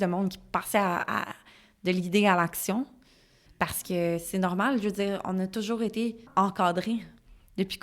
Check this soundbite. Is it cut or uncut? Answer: cut